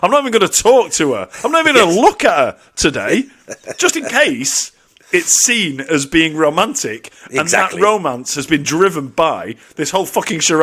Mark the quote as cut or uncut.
uncut